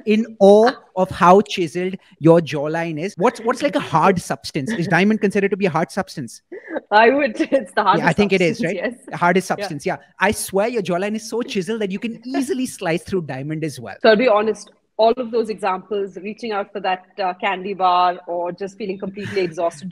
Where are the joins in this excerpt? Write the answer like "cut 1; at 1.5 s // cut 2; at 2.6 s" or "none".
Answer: cut 1; at 3.0 s // cut 2; at 13.8 s